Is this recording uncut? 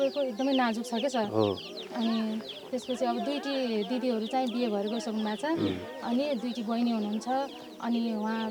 yes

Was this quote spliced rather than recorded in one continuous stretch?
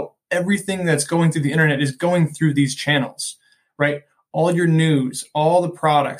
no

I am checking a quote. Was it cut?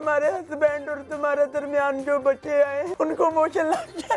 yes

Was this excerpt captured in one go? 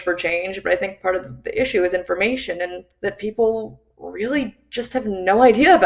no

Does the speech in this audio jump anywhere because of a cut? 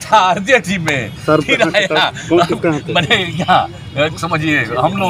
no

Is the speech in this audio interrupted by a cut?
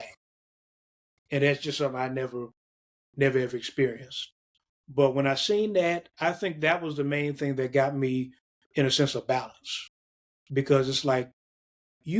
no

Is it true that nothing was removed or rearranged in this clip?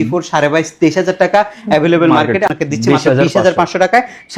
yes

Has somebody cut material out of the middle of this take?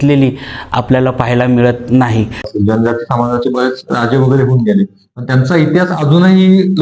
yes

